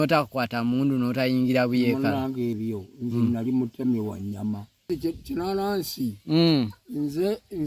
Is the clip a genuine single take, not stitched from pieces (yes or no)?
no